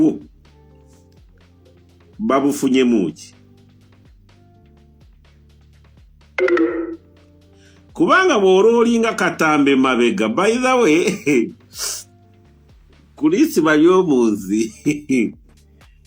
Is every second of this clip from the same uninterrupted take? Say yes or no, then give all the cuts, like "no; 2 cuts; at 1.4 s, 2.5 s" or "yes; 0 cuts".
yes; 0 cuts